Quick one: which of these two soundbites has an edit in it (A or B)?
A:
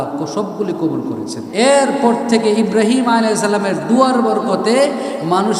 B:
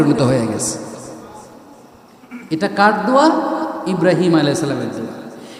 A